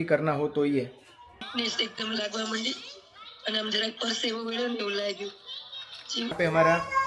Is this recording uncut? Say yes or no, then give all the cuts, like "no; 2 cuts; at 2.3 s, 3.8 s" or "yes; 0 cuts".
no; 2 cuts; at 1.2 s, 6.3 s